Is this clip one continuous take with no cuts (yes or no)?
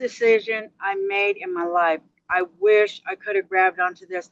yes